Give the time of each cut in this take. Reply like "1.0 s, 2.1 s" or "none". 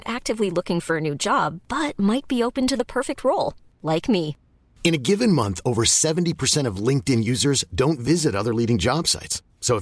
none